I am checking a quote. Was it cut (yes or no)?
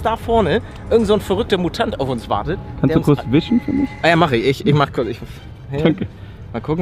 no